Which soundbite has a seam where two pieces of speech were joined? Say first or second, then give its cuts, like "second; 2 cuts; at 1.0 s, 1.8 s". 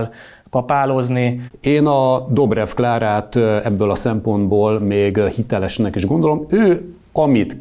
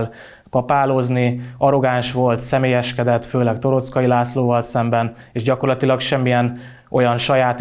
first; 1 cut; at 1.4 s